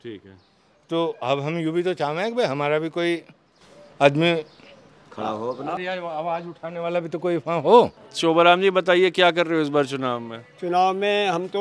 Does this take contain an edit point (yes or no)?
yes